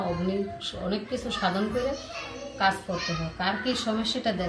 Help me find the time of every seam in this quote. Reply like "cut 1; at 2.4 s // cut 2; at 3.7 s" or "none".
none